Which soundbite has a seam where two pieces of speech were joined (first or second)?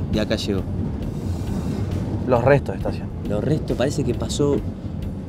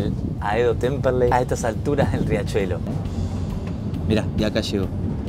second